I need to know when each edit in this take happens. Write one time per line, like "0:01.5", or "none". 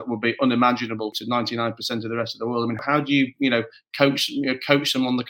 0:01.2
0:02.8